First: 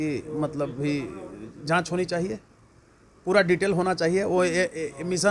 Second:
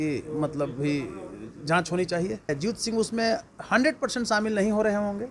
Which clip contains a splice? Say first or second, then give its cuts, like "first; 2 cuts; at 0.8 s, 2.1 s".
second; 1 cut; at 2.6 s